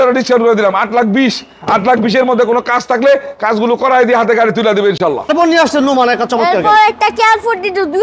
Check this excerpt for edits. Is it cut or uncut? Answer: uncut